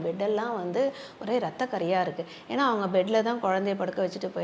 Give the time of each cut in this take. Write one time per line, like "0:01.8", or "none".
none